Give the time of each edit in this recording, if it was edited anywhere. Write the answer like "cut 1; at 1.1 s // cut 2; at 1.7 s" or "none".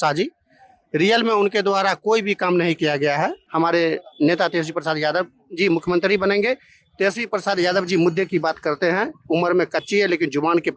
cut 1; at 3.4 s